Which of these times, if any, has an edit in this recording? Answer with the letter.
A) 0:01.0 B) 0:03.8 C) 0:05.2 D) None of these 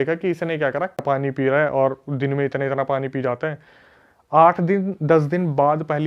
A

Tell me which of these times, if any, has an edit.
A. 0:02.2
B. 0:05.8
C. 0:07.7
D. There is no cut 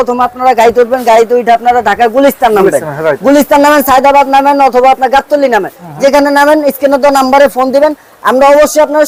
D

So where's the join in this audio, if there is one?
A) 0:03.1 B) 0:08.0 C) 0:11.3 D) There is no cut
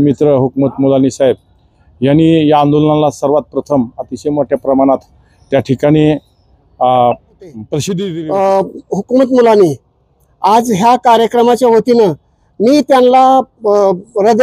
B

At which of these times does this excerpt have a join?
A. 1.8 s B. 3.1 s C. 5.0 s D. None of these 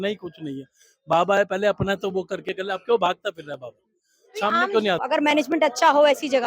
C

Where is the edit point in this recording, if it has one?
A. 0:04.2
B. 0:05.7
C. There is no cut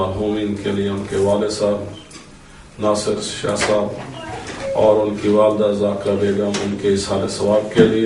C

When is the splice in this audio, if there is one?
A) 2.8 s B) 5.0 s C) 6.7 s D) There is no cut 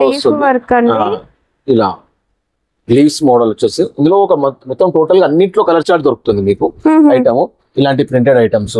D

